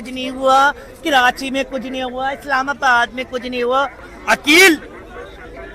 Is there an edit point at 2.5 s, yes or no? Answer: no